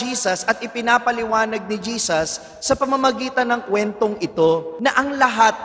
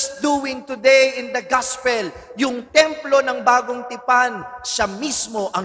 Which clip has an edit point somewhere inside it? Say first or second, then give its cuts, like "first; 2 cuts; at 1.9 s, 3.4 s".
first; 1 cut; at 4.7 s